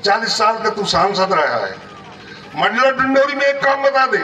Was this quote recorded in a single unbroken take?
yes; 0 cuts

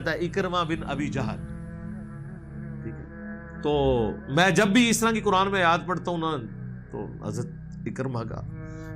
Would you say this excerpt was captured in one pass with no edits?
no; 2 cuts; at 1.2 s, 3.6 s

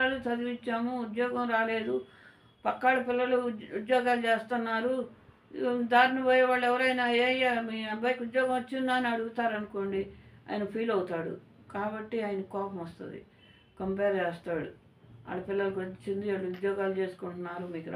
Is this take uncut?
yes; 0 cuts

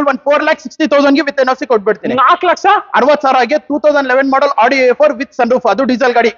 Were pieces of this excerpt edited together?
no; 0 cuts

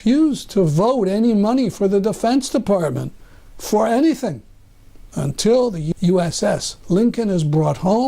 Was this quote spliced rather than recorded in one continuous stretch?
yes; 1 cut; at 5.8 s

